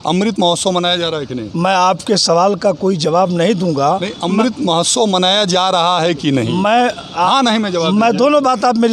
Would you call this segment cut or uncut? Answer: uncut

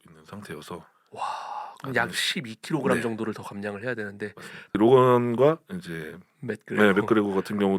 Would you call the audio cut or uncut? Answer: cut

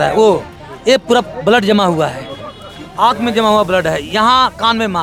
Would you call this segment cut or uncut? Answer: uncut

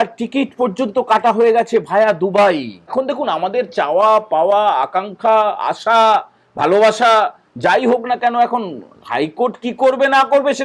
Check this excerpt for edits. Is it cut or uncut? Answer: cut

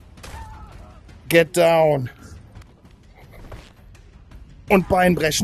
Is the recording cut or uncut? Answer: cut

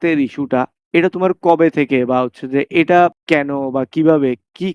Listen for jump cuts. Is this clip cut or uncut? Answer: uncut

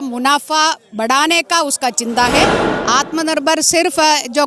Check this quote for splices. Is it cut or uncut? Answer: cut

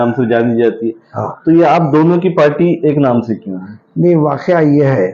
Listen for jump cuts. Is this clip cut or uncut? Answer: uncut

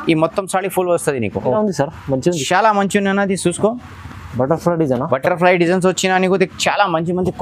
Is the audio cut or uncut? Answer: cut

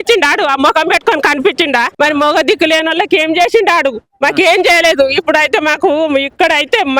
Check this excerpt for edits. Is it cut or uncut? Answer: cut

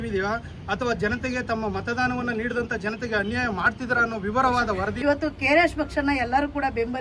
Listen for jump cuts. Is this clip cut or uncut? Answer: cut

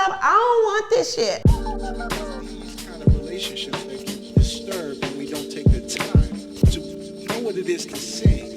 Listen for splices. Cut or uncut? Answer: cut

